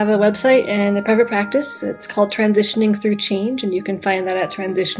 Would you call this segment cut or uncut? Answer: uncut